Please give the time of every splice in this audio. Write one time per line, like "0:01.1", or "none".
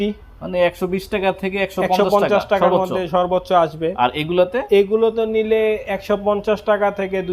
none